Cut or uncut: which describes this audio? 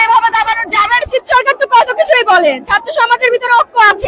cut